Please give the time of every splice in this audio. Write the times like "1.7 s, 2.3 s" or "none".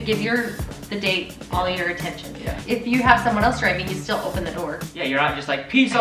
2.6 s